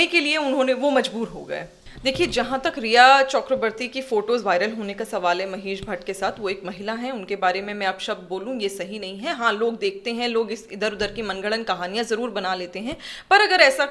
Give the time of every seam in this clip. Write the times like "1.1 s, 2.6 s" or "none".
1.8 s